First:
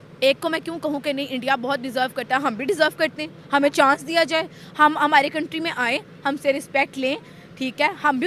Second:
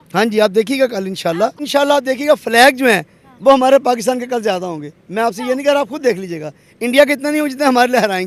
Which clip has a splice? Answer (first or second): second